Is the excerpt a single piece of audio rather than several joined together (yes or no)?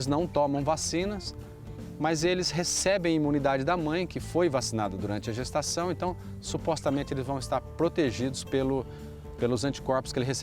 yes